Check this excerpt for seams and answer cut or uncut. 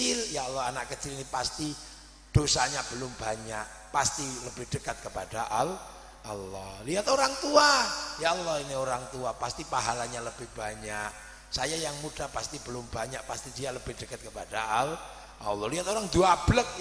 cut